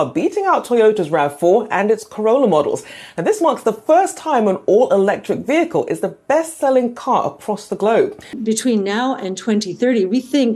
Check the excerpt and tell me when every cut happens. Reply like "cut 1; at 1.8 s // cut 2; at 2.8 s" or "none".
cut 1; at 8.3 s